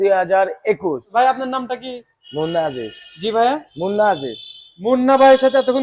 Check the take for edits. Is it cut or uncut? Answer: cut